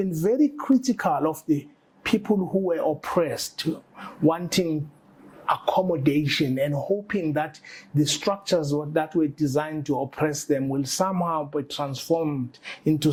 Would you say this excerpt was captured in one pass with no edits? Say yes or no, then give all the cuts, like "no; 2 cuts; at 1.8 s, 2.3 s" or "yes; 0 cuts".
yes; 0 cuts